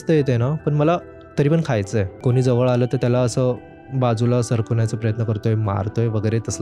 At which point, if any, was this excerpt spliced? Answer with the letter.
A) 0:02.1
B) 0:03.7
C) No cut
A